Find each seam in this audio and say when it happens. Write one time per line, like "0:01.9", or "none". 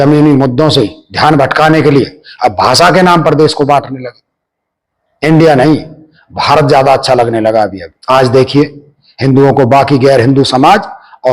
0:07.9